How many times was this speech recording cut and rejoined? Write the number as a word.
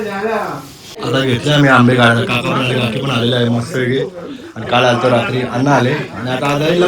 one